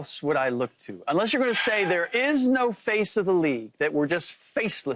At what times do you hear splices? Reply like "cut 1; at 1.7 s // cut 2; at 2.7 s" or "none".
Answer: none